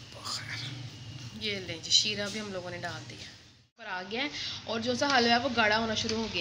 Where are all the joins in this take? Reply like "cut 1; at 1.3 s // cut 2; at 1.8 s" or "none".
cut 1; at 4.0 s